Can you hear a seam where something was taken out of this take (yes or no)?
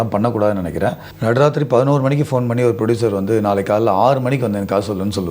yes